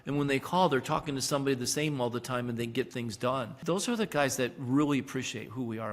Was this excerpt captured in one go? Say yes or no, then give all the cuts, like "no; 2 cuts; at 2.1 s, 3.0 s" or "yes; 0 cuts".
no; 1 cut; at 3.5 s